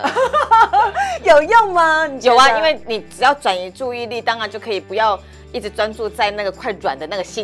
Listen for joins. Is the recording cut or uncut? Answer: uncut